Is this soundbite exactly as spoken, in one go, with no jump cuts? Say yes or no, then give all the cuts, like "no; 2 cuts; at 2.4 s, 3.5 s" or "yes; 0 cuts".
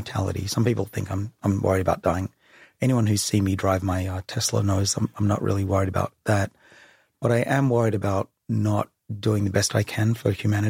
yes; 0 cuts